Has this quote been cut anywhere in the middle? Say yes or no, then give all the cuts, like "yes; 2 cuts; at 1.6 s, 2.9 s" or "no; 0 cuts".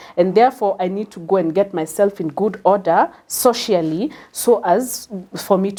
no; 0 cuts